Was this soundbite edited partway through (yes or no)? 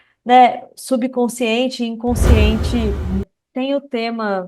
yes